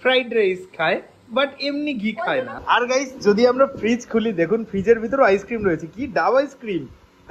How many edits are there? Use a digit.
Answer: 1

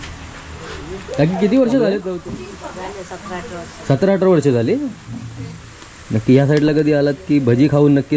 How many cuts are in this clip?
1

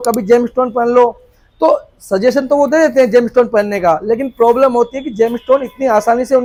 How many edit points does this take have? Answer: 0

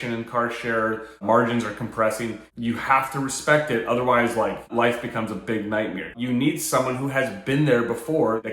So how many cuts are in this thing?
2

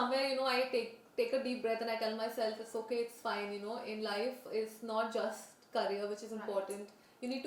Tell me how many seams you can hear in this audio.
0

